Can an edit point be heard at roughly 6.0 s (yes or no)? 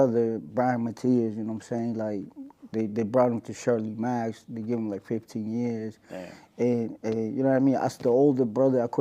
no